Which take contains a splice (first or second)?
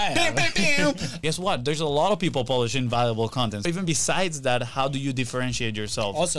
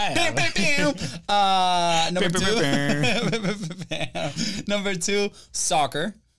first